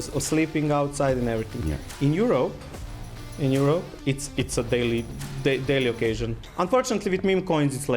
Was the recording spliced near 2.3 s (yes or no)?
no